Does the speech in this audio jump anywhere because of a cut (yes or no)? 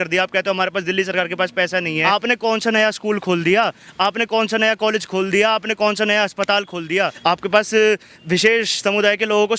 yes